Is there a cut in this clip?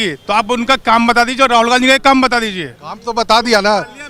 no; 0 cuts

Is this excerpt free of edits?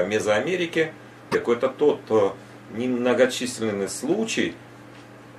no; 1 cut; at 1.3 s

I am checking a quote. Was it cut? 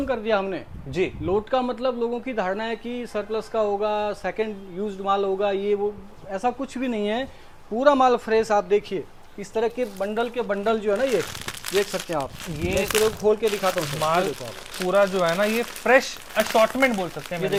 no; 0 cuts

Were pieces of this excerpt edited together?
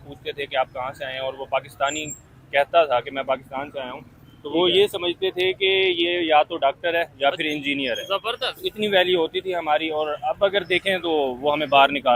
no; 0 cuts

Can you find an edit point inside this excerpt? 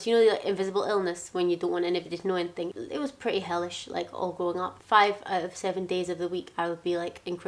yes; 2 cuts; at 2.7 s, 4.8 s

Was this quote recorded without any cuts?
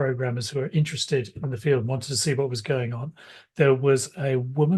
yes; 0 cuts

